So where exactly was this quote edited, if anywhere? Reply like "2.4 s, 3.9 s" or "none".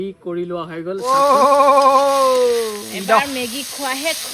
1.0 s